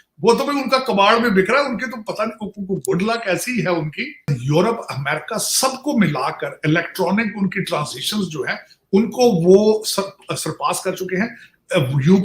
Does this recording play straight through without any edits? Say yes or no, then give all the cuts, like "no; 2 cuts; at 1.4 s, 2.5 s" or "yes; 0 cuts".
no; 1 cut; at 4.4 s